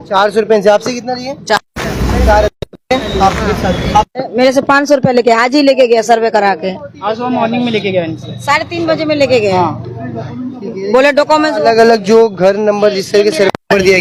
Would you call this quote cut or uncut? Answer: uncut